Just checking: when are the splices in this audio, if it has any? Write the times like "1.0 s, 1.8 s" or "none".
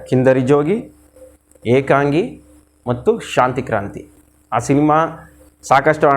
4.0 s